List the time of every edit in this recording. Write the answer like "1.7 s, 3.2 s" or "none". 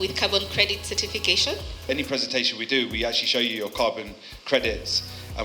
1.9 s